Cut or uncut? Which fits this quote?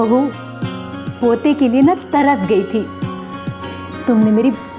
uncut